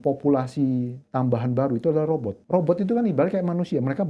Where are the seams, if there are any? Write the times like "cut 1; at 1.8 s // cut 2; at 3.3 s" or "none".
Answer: cut 1; at 2.4 s